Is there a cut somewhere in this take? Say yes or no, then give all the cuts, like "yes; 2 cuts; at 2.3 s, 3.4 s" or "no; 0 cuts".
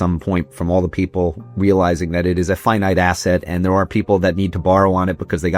no; 0 cuts